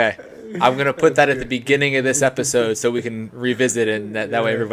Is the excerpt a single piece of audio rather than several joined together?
yes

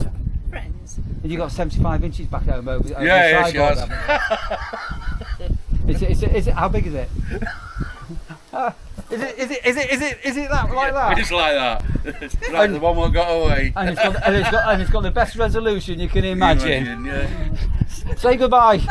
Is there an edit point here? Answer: no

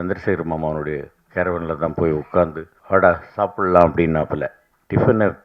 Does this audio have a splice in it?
yes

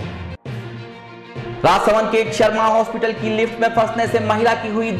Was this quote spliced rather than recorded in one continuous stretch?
yes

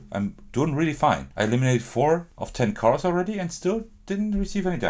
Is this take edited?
yes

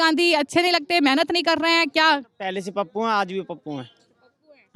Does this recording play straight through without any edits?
yes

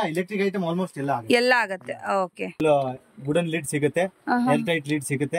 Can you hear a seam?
yes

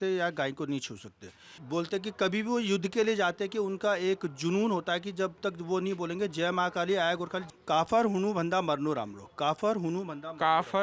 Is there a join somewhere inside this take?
yes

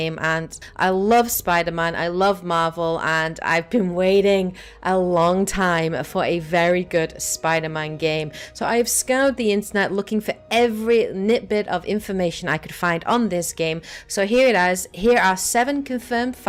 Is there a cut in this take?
no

